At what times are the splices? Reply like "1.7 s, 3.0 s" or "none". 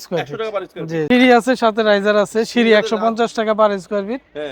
1.0 s